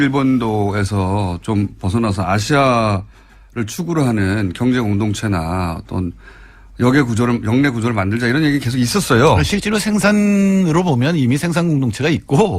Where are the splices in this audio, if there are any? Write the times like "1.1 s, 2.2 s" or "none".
2.8 s

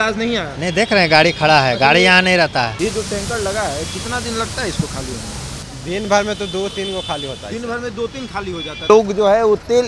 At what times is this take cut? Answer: 2.7 s, 5.7 s, 8.9 s

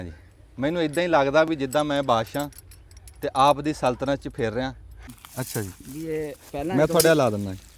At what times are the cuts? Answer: 5.1 s

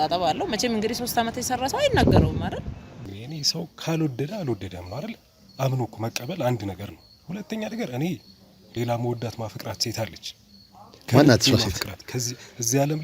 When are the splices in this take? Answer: 3.1 s

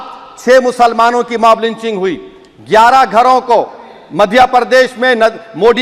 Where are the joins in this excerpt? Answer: none

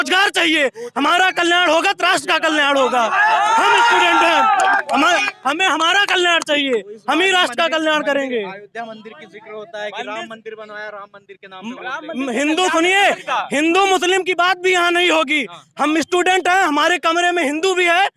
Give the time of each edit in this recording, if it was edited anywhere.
none

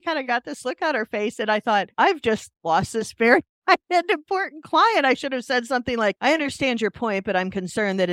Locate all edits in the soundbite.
none

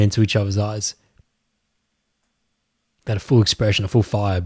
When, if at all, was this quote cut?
none

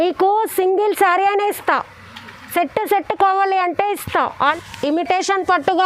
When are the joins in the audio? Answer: 4.5 s

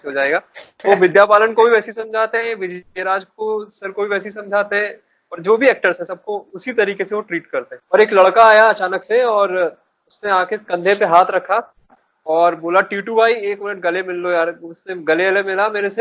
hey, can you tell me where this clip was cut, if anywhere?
7.7 s

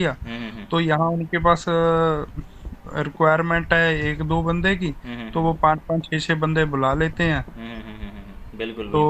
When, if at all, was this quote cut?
none

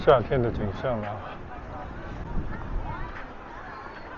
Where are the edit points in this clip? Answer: none

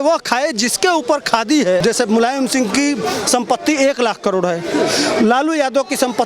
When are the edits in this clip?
1.8 s

